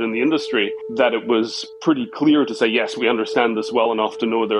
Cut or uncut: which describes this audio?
uncut